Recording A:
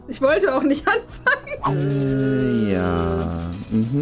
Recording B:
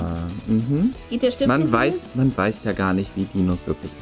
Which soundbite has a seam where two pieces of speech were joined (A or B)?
A